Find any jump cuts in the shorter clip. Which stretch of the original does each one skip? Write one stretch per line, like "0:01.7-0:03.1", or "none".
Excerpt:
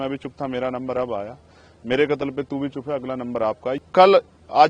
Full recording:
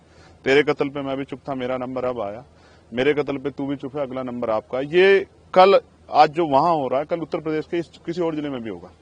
0:04.8-0:05.3